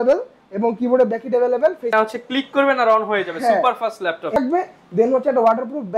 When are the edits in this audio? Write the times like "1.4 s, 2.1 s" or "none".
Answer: 1.9 s, 4.4 s